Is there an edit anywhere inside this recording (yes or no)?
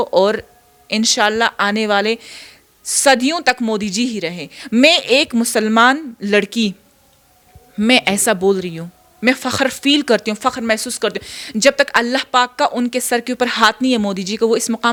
no